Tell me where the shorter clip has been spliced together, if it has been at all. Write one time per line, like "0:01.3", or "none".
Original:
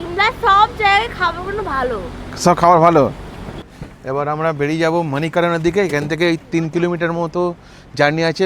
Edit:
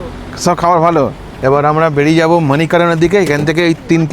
0:01.2